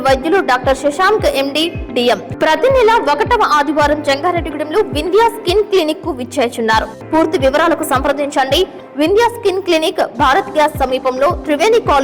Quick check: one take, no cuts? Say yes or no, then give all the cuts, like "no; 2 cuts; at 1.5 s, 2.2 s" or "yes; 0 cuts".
no; 2 cuts; at 2.3 s, 7.0 s